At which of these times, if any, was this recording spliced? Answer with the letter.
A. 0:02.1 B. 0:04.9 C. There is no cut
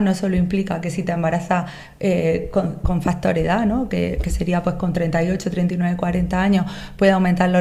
C